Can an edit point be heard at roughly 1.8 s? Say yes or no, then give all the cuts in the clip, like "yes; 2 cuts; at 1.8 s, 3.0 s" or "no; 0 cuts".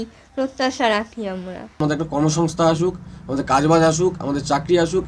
yes; 1 cut; at 1.8 s